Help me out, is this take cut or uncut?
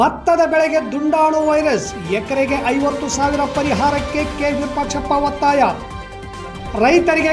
uncut